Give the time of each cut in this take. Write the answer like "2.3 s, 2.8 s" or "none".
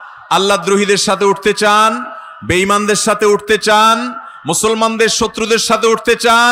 none